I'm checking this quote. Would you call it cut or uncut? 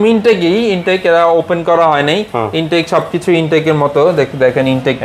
uncut